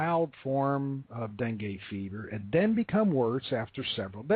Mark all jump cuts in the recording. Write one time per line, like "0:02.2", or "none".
0:02.4